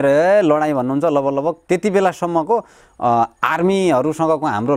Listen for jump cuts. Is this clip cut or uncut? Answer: uncut